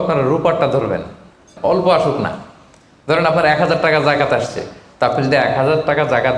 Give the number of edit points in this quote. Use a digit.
1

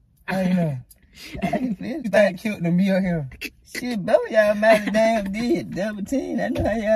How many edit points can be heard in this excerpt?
1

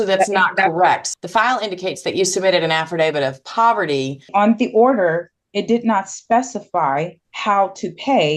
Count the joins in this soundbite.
3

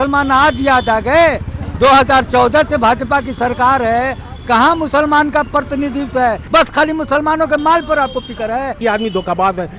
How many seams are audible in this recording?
2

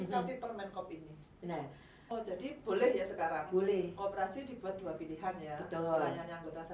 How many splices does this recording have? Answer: 1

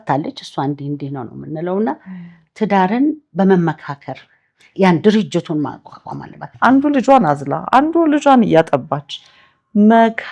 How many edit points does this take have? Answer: 1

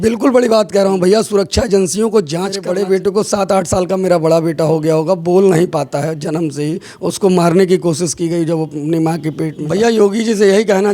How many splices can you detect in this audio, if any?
2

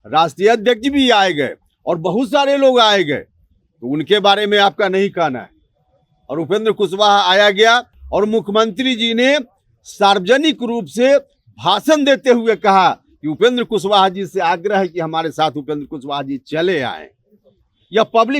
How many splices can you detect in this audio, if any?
1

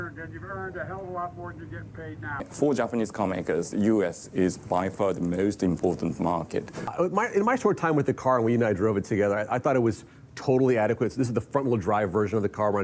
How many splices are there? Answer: 2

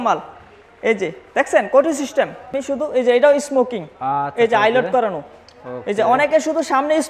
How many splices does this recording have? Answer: 1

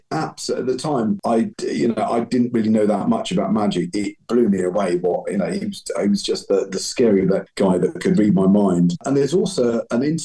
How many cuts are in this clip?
3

